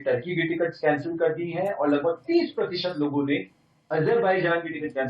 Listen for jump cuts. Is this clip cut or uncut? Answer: uncut